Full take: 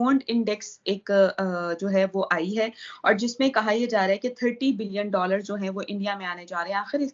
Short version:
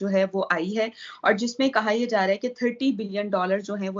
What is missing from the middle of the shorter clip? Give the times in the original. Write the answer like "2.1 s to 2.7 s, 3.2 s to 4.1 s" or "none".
none